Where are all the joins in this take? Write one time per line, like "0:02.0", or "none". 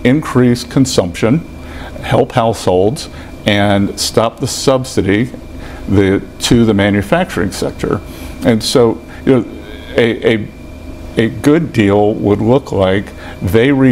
none